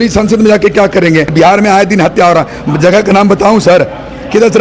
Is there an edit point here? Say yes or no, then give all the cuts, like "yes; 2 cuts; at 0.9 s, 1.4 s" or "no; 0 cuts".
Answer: yes; 1 cut; at 1.3 s